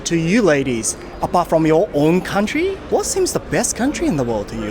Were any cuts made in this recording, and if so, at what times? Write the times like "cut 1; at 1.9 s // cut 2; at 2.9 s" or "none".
cut 1; at 2.8 s